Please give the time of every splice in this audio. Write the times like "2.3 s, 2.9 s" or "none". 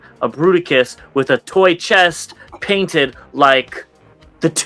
none